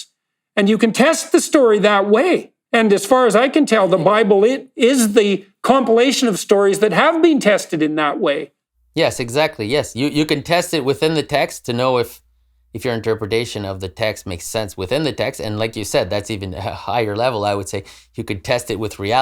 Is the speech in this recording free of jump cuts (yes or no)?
no